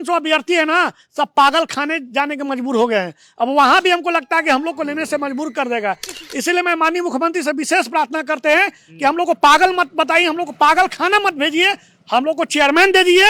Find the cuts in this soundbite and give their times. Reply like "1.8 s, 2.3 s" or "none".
none